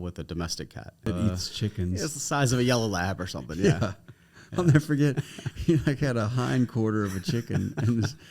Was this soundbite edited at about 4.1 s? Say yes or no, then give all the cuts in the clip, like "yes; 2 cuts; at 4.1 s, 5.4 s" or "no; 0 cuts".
no; 1 cut; at 1.0 s